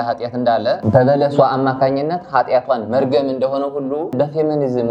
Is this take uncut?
yes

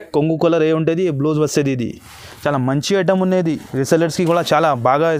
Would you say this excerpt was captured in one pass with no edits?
yes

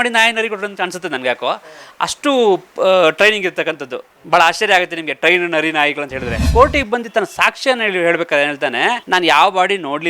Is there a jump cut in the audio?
yes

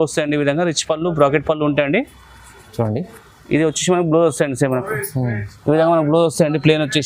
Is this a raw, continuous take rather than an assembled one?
yes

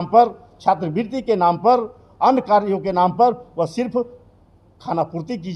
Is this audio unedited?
yes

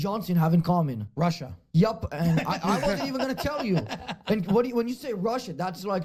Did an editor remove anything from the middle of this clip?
no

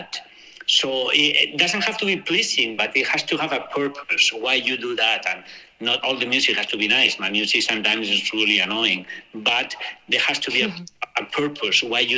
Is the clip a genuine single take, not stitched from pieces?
yes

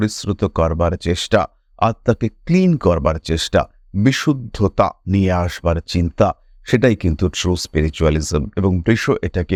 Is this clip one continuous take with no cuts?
yes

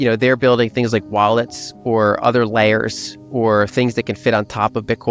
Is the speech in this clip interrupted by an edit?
no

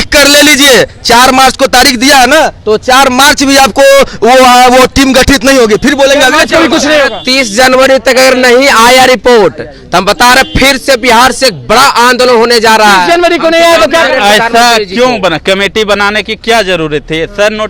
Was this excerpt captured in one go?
yes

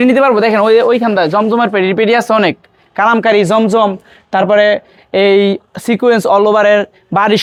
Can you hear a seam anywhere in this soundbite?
no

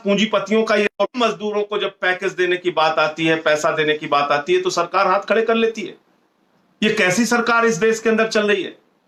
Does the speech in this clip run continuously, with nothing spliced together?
yes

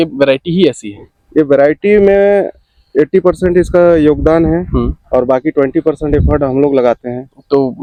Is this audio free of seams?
yes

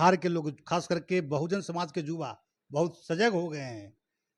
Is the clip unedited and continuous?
yes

